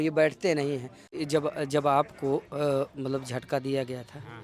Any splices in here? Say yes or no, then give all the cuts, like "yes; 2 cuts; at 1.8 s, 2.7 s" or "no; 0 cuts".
yes; 1 cut; at 1.1 s